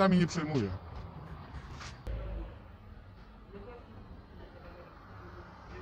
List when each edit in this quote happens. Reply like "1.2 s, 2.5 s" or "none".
2.1 s